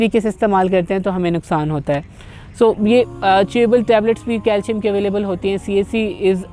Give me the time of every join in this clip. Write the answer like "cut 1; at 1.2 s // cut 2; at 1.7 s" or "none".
none